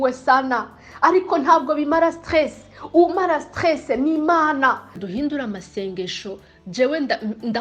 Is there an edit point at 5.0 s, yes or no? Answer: yes